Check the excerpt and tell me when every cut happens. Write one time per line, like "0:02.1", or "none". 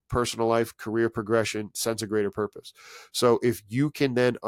none

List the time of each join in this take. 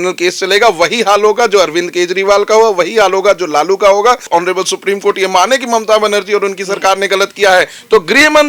0:04.2

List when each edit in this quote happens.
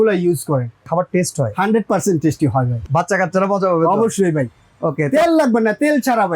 0:00.8
0:02.8

